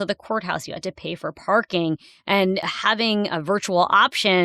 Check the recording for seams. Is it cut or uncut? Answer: cut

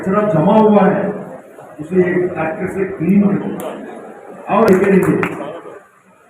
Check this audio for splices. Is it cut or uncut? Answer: cut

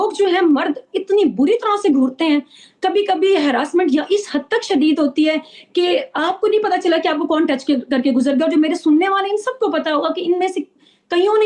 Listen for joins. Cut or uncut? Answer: uncut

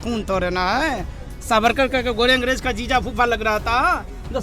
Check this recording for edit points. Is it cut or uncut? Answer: uncut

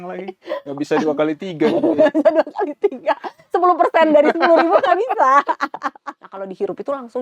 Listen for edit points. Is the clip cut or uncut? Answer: cut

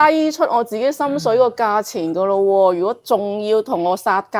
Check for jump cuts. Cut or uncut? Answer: uncut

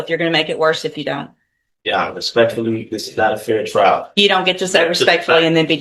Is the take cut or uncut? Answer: uncut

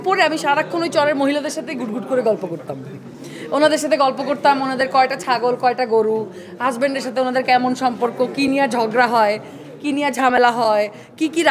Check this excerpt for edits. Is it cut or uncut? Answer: uncut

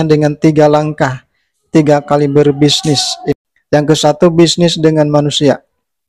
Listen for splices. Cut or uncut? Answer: cut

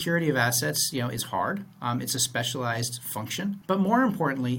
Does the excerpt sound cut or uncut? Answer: cut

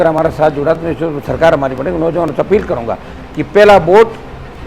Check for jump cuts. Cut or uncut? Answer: uncut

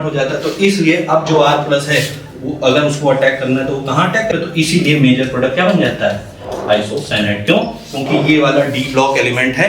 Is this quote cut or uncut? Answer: cut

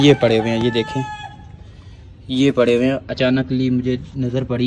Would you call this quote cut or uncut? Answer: uncut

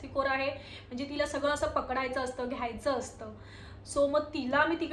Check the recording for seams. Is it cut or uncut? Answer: uncut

